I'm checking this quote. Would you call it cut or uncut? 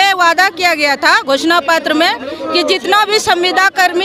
uncut